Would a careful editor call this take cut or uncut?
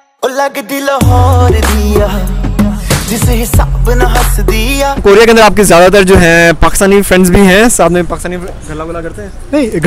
uncut